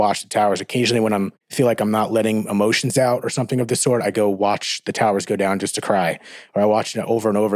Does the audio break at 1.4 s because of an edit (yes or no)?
yes